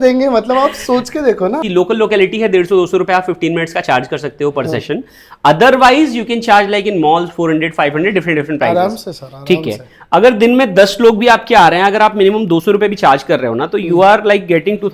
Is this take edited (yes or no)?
yes